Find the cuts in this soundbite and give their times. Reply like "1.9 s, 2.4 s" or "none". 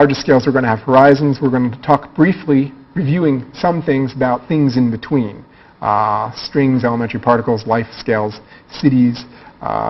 2.6 s